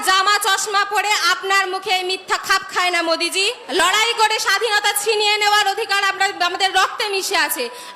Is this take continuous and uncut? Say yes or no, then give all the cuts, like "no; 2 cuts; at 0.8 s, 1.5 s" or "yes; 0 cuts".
no; 1 cut; at 3.6 s